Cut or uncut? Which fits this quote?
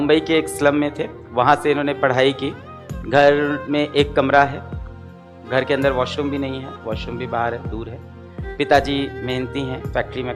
uncut